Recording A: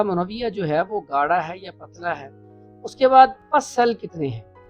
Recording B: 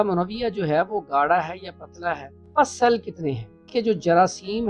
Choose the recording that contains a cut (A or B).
B